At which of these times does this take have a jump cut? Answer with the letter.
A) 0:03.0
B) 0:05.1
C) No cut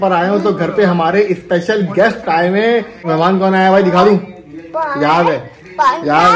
A